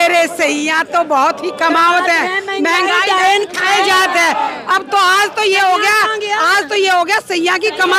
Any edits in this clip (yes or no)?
no